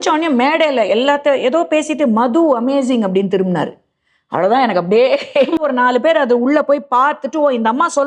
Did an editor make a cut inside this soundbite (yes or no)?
yes